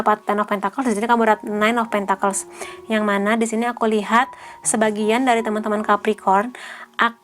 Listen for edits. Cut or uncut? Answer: uncut